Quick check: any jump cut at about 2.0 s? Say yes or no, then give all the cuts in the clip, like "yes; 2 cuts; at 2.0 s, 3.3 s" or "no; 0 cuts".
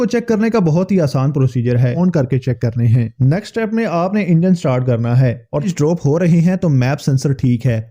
yes; 2 cuts; at 2.0 s, 5.7 s